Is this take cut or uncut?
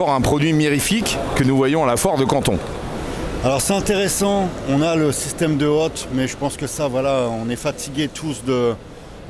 uncut